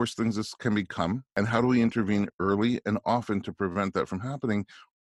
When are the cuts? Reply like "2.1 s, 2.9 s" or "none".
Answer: 1.3 s